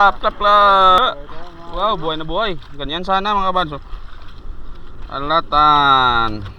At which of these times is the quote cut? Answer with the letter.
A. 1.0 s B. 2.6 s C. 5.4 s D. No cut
A